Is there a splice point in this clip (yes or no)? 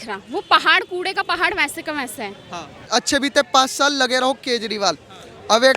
yes